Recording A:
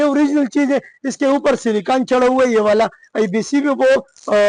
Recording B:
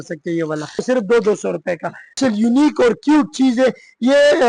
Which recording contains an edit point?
B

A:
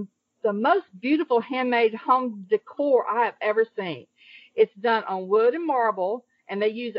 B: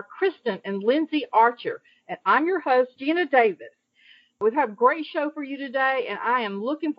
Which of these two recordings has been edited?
B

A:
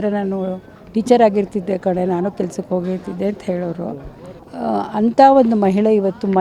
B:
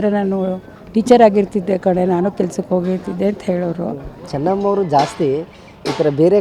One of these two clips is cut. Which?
B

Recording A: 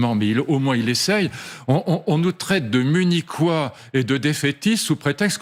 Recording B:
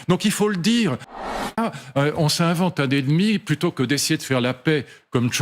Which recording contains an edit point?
B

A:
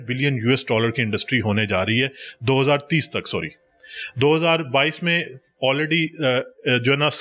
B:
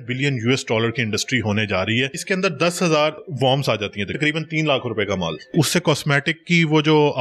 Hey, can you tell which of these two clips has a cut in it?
B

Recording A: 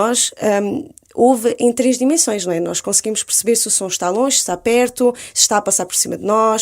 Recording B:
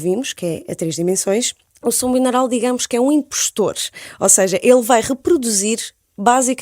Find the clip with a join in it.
B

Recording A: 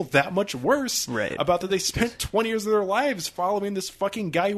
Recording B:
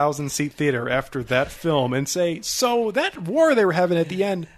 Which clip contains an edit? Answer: B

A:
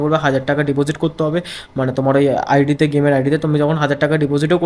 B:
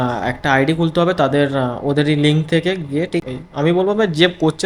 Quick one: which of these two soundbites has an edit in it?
B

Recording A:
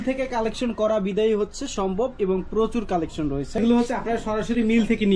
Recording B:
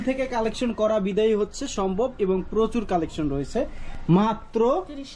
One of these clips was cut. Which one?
A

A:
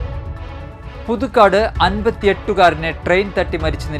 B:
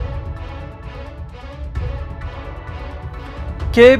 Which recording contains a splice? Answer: A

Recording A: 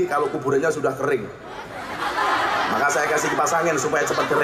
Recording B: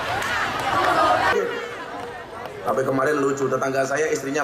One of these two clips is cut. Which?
B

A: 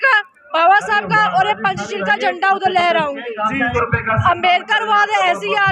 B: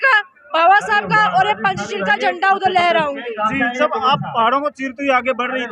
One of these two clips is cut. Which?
A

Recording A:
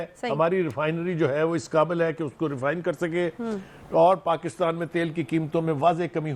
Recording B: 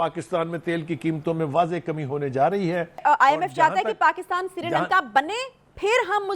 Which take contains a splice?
B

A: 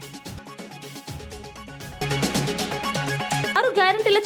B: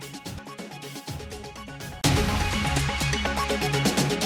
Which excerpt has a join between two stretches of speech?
B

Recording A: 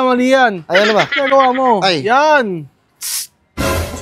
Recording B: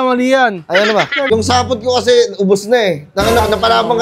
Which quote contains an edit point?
B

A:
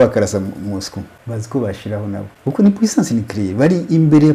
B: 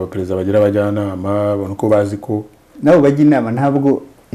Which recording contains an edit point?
A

